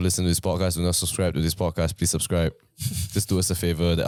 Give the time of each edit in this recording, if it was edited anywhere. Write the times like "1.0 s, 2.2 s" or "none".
none

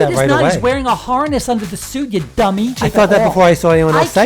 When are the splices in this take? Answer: 2.8 s

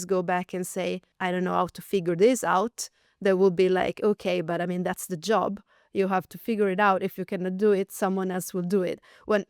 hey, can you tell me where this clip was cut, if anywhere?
1.1 s

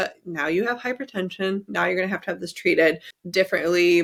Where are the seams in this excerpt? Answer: none

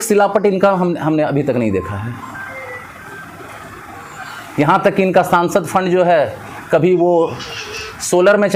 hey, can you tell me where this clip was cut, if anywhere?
none

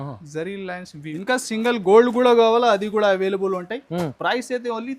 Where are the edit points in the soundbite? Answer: 1.1 s

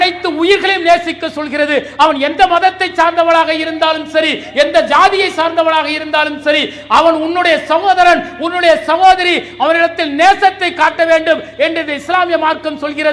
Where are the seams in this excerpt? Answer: none

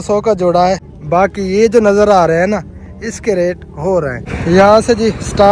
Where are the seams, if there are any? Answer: 0.9 s, 4.2 s

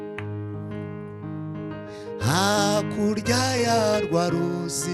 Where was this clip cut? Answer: none

